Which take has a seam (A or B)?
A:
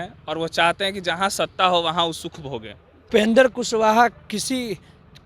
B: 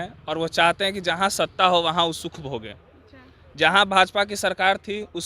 A